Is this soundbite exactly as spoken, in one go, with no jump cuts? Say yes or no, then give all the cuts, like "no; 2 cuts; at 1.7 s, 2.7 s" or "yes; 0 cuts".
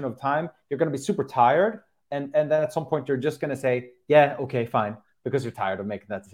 yes; 0 cuts